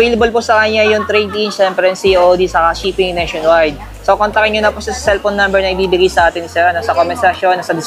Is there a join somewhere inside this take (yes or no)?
no